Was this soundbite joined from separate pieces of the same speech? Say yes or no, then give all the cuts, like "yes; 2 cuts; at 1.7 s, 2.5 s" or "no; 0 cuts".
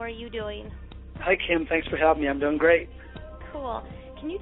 no; 0 cuts